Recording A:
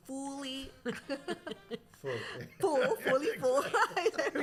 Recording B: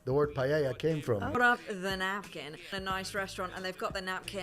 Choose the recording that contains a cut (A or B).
B